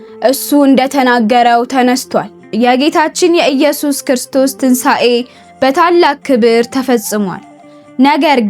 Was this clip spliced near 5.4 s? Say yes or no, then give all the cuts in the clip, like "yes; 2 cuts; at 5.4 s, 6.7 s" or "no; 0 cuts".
no; 1 cut; at 2.4 s